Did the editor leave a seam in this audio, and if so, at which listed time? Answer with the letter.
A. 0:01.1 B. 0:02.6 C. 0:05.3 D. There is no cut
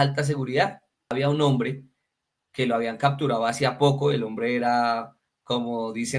A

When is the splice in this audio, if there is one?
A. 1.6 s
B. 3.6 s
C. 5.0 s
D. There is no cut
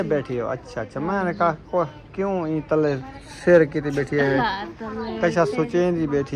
D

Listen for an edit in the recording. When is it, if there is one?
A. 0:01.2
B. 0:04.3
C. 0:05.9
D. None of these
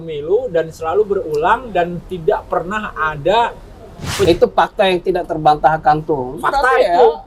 B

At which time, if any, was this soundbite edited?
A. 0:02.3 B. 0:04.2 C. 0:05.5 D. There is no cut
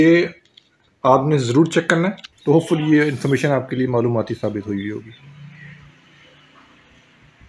A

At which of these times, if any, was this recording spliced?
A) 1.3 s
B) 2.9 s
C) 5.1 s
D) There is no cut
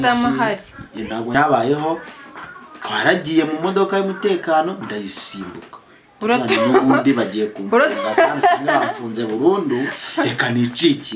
A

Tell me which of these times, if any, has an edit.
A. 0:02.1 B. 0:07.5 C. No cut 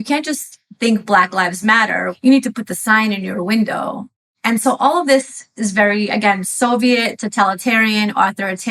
A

